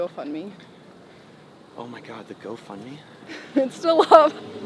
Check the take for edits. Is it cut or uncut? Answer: uncut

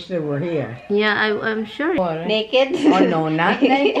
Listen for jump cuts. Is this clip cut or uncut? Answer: cut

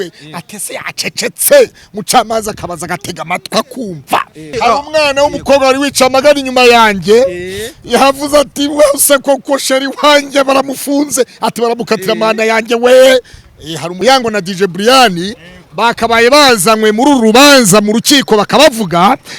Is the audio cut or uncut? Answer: cut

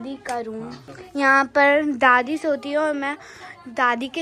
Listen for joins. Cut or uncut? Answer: cut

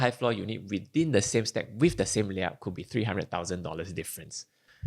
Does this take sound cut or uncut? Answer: uncut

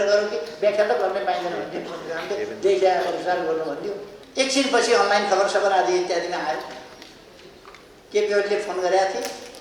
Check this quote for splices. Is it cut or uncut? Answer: cut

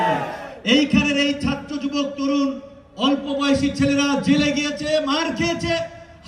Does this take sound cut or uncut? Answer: uncut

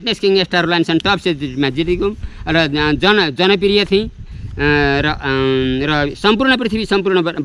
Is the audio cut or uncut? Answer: uncut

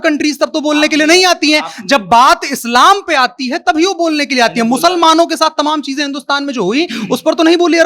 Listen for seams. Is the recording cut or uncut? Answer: uncut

